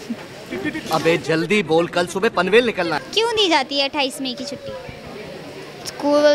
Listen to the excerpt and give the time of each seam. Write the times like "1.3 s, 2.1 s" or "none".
3.0 s